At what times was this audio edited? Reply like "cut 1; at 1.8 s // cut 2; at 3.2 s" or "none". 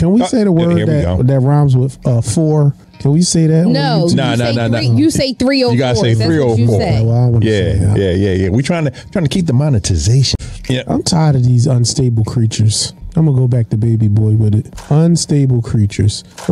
none